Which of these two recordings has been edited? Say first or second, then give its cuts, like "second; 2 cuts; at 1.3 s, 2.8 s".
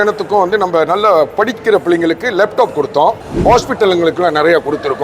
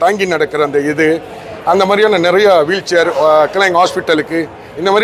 first; 1 cut; at 3.3 s